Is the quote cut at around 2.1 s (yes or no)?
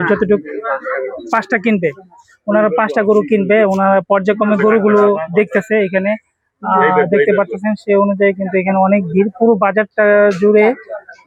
no